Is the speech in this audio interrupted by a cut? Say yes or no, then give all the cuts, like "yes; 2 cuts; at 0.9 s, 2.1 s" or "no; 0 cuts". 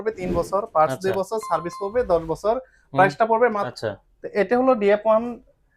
yes; 1 cut; at 3.7 s